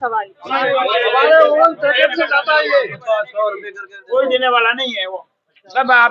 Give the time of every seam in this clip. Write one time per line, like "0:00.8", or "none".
none